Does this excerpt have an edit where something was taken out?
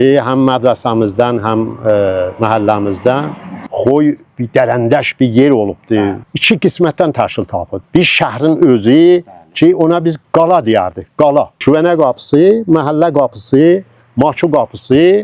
yes; 3 cuts; at 3.7 s, 6.2 s, 11.5 s

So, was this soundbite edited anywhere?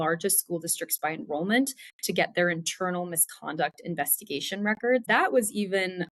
yes; 1 cut; at 5.1 s

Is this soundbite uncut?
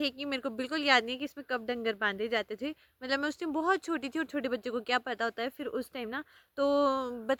yes; 0 cuts

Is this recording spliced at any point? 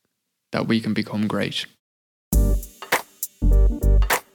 yes; 1 cut; at 2.2 s

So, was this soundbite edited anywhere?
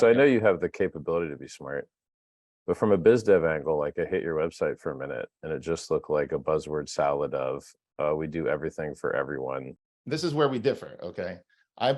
yes; 1 cut; at 9.7 s

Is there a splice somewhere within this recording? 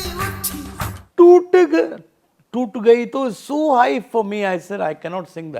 yes; 1 cut; at 1.0 s

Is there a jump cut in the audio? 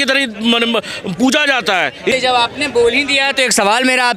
yes; 1 cut; at 2.1 s

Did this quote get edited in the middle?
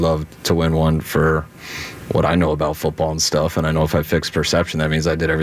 no; 0 cuts

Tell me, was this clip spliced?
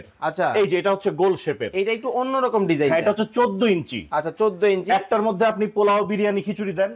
no; 0 cuts

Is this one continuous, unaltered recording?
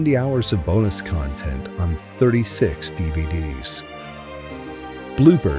yes; 0 cuts

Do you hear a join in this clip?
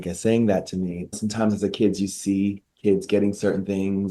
yes; 1 cut; at 1.2 s

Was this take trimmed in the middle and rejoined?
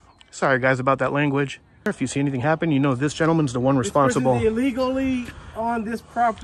yes; 1 cut; at 1.9 s

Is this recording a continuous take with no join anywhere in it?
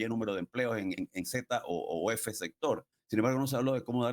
no; 2 cuts; at 1.0 s, 2.9 s

